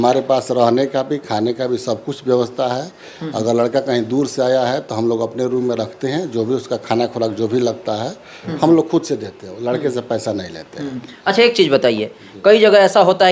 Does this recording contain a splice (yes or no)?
no